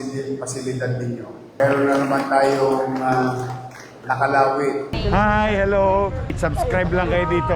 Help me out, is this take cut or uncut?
cut